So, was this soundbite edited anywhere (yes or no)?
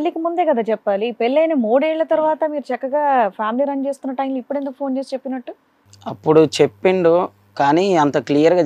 no